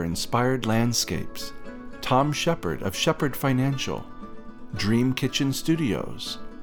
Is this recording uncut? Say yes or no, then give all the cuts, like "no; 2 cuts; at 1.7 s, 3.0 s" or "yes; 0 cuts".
yes; 0 cuts